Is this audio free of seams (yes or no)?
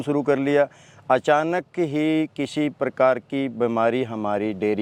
yes